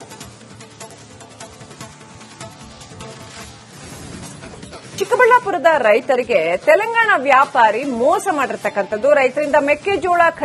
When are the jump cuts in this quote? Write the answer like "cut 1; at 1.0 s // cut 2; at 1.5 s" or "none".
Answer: cut 1; at 1.1 s